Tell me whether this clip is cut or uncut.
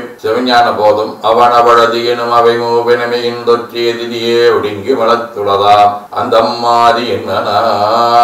cut